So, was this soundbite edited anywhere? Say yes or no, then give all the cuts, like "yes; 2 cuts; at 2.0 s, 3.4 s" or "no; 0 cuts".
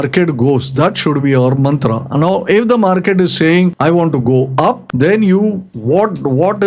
yes; 3 cuts; at 3.8 s, 4.9 s, 5.7 s